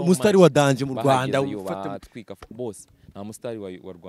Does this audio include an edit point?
no; 0 cuts

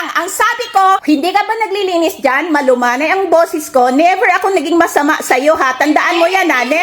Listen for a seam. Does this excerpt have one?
yes; 1 cut; at 1.0 s

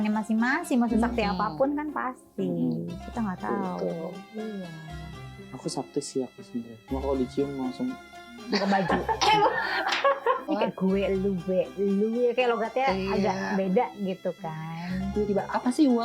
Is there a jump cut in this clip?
yes; 1 cut; at 10.5 s

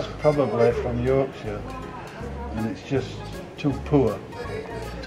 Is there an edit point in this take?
no; 0 cuts

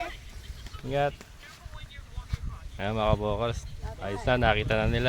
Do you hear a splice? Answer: no; 0 cuts

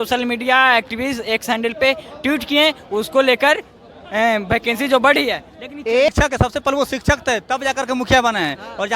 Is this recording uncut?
no; 1 cut; at 6.1 s

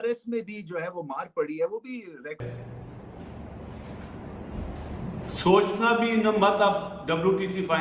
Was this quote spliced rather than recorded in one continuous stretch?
yes; 1 cut; at 2.4 s

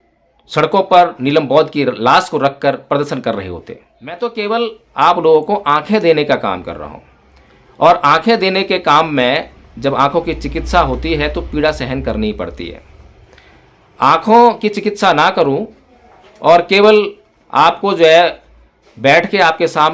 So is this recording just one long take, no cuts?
no; 1 cut; at 4.2 s

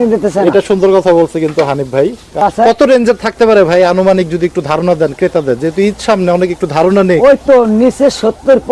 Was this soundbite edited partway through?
yes; 1 cut; at 2.4 s

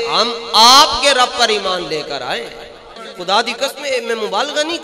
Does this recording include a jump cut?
yes; 1 cut; at 3.1 s

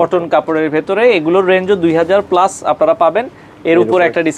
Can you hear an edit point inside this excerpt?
no; 0 cuts

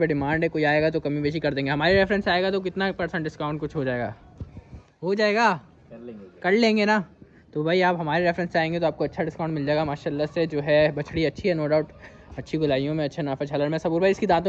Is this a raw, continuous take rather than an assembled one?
yes; 0 cuts

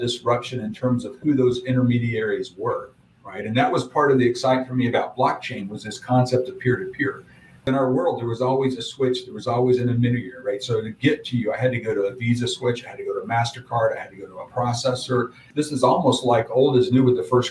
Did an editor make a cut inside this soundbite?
yes; 2 cuts; at 7.7 s, 15.5 s

